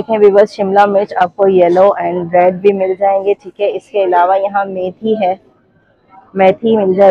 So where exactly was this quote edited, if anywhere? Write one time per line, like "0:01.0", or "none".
none